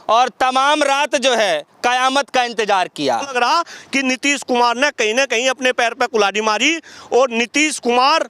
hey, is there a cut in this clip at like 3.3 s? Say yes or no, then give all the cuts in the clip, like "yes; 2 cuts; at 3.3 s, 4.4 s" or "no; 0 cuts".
yes; 1 cut; at 3.3 s